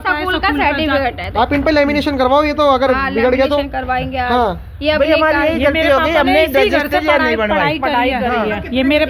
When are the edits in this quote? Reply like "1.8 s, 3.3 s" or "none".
none